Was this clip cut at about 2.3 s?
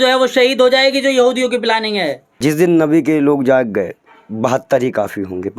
yes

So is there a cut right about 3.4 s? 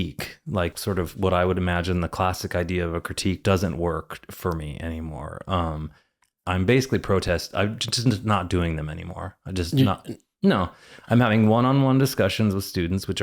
yes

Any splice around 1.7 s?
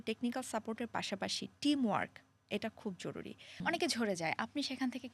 no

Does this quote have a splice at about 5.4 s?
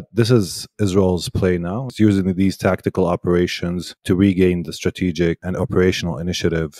yes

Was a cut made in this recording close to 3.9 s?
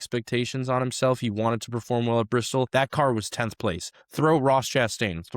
no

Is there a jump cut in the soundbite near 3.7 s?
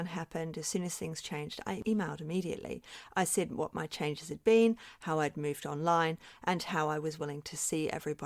no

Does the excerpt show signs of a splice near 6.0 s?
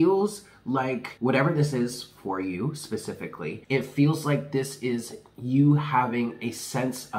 no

